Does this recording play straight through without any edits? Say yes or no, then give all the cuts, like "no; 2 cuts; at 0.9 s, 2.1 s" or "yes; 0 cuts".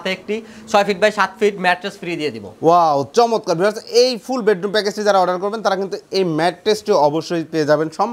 yes; 0 cuts